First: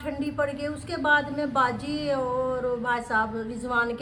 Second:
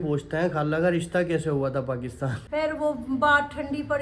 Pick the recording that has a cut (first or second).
second